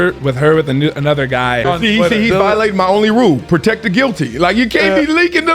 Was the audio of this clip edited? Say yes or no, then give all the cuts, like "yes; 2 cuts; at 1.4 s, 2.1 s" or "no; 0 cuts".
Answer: yes; 1 cut; at 1.6 s